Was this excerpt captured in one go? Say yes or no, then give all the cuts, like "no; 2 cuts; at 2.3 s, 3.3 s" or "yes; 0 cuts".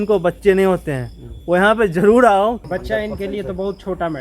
no; 1 cut; at 2.6 s